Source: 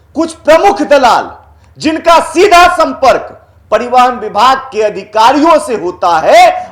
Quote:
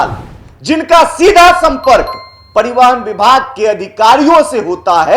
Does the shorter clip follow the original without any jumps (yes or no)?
yes